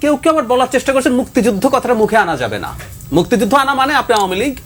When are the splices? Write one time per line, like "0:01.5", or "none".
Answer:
none